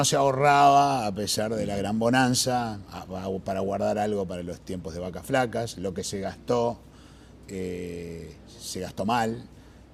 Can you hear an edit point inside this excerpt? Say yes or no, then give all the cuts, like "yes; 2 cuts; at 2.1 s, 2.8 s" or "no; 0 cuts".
yes; 1 cut; at 3.9 s